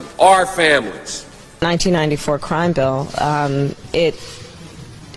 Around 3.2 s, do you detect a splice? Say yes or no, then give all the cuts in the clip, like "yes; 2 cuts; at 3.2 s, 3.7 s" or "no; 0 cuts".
no; 1 cut; at 1.6 s